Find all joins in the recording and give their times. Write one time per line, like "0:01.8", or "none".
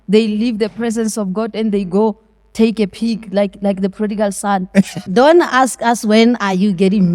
0:05.0

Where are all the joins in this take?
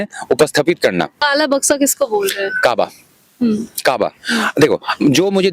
0:01.1

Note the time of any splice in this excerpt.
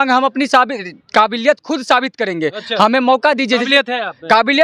none

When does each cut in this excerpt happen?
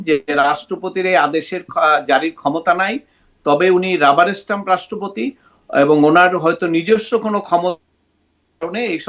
none

